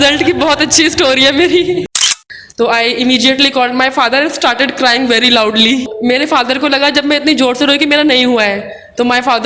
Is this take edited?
yes; 2 cuts; at 2.2 s, 5.9 s

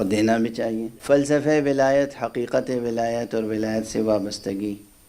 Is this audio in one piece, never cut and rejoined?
no; 1 cut; at 0.9 s

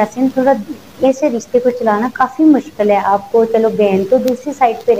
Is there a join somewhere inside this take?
no; 0 cuts

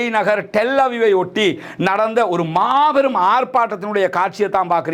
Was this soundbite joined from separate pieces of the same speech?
no; 0 cuts

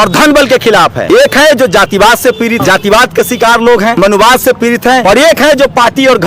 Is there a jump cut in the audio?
yes; 4 cuts; at 1.0 s, 2.6 s, 3.9 s, 5.0 s

